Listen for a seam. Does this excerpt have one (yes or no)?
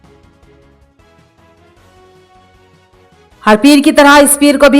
yes